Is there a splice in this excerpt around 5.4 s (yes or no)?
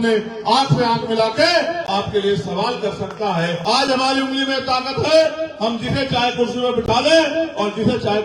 no